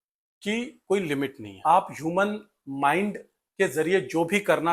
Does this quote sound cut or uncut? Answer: cut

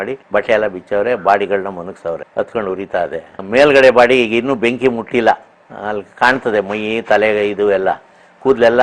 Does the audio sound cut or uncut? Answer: uncut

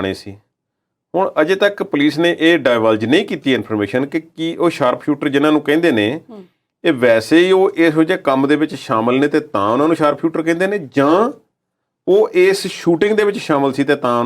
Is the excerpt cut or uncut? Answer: uncut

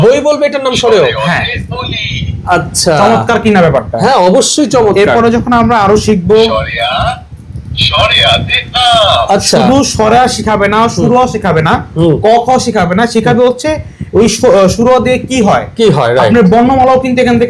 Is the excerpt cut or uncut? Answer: uncut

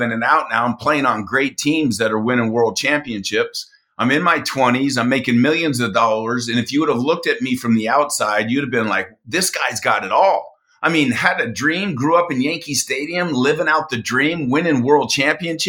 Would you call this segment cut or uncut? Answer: uncut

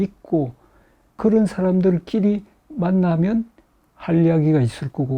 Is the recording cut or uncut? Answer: cut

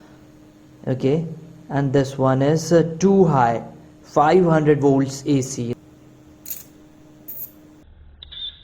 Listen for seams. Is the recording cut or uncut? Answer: cut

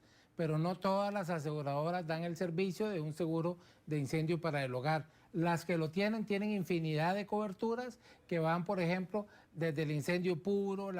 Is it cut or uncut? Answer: uncut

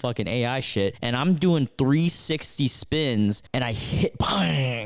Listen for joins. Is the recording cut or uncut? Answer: cut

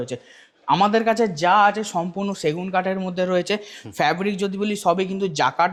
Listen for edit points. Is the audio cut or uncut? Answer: uncut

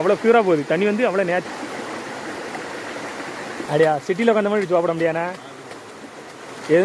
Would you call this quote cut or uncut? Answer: cut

